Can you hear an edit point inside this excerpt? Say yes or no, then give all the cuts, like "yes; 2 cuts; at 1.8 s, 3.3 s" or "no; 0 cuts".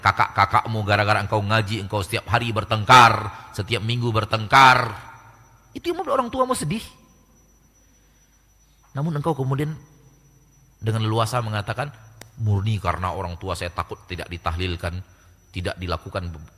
no; 0 cuts